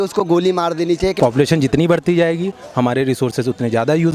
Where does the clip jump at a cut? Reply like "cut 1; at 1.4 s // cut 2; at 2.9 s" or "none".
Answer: cut 1; at 1.1 s